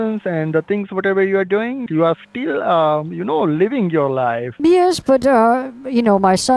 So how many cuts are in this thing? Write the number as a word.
two